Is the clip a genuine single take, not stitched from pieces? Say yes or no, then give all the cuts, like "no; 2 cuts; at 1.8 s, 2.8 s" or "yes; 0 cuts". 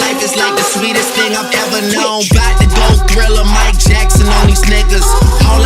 no; 1 cut; at 1.7 s